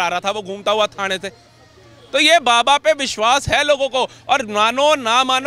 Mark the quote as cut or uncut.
uncut